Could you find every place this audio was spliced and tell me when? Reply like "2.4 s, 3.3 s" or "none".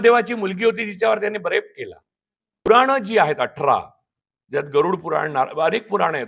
2.7 s